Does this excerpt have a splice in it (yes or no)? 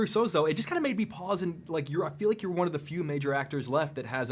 no